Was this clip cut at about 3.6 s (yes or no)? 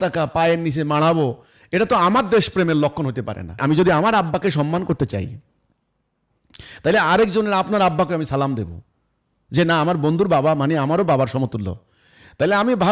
yes